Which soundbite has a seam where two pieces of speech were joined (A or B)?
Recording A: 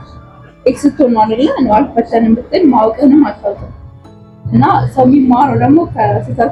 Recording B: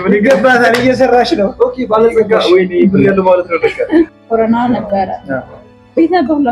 B